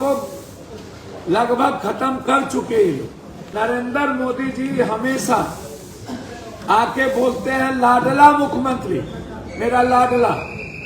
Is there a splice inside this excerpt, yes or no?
yes